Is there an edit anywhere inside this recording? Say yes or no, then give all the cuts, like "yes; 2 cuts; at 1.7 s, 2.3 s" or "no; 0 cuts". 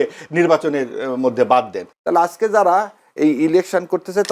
yes; 1 cut; at 1.8 s